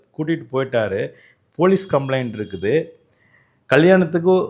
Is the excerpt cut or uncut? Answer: uncut